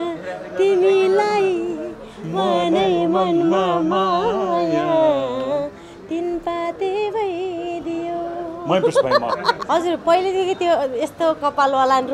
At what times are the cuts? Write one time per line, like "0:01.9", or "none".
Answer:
0:09.6